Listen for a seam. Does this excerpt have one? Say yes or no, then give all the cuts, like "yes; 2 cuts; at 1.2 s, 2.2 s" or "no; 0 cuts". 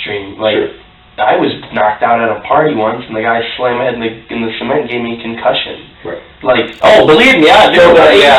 yes; 1 cut; at 6.7 s